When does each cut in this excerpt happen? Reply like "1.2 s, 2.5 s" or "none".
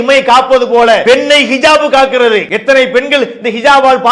1.0 s, 2.5 s

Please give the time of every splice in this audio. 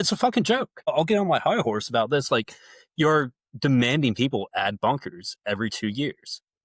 0.9 s

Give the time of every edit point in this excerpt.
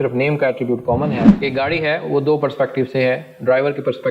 1.3 s

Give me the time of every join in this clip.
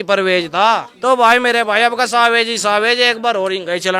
0.9 s

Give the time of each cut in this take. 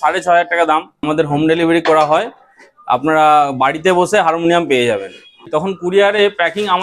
1.0 s, 5.4 s

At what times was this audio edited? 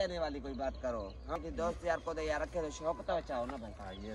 1.3 s

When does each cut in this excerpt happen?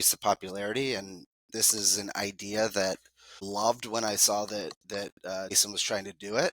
3.5 s, 5.6 s

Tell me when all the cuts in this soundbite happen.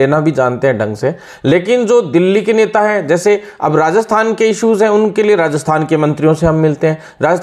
none

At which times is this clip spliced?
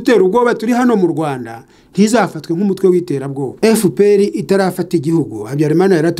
3.5 s

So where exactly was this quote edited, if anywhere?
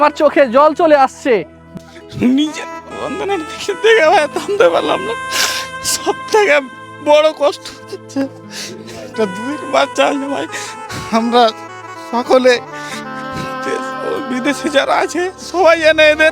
1.6 s

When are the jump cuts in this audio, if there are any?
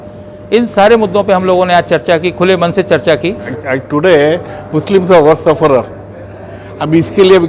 3.5 s

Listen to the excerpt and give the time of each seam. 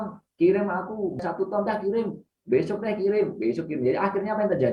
1.2 s

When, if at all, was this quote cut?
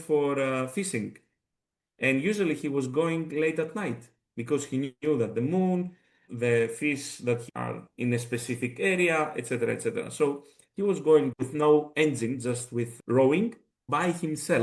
6.3 s, 7.4 s, 11.3 s, 13.8 s

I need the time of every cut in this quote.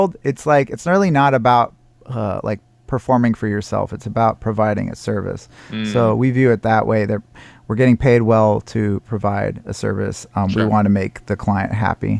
none

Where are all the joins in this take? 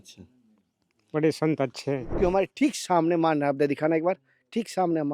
2.1 s

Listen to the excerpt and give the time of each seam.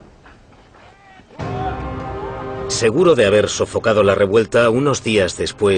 2.4 s

